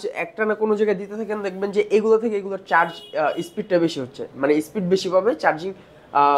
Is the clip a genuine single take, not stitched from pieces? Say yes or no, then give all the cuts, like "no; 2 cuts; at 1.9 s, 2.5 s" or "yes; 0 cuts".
yes; 0 cuts